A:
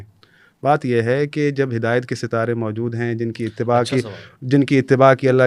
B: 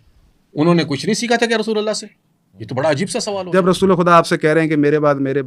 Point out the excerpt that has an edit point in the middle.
B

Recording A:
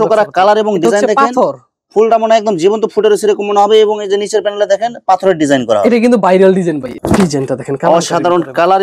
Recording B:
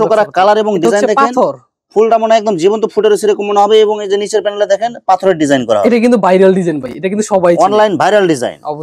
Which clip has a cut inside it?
A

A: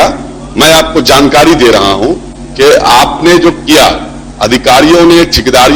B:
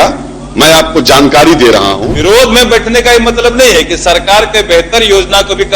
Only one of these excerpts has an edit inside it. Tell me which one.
B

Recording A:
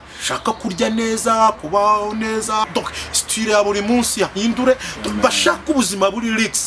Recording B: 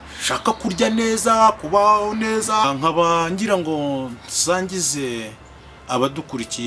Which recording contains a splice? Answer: B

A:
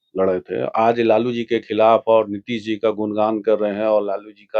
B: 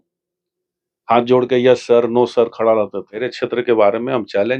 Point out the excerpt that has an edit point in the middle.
B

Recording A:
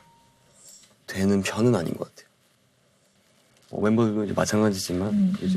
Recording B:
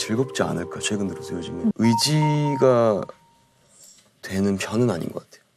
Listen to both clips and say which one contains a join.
B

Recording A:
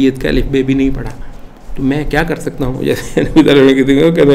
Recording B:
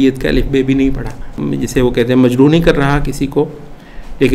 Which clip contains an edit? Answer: B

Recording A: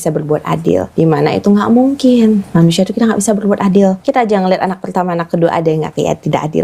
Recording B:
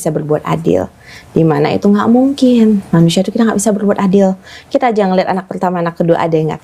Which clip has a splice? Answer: A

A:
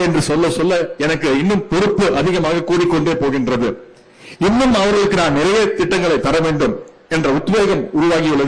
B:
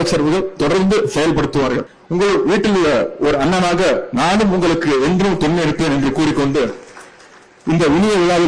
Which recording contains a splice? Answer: B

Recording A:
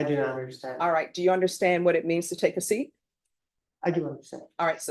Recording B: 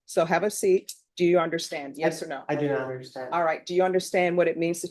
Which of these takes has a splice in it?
B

